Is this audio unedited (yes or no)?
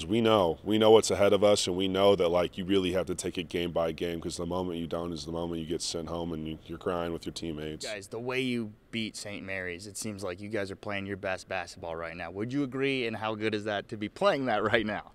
no